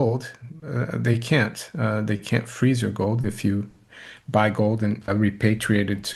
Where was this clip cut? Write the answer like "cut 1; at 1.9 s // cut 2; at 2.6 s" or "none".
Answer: cut 1; at 5.1 s